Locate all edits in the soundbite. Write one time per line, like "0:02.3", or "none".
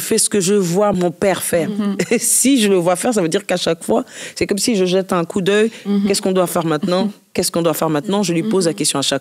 0:01.0